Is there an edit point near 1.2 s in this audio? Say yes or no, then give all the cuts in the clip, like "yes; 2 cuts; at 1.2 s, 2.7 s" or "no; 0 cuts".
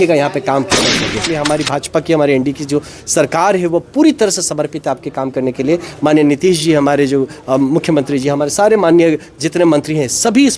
yes; 1 cut; at 1.2 s